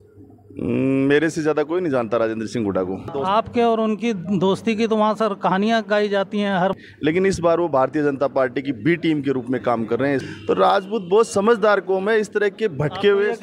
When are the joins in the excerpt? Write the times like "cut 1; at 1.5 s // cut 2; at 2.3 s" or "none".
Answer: cut 1; at 3.1 s // cut 2; at 6.7 s // cut 3; at 10.3 s